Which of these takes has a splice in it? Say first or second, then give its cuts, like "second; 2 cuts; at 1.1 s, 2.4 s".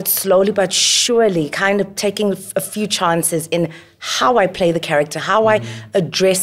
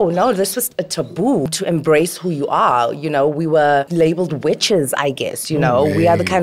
second; 2 cuts; at 1.5 s, 3.9 s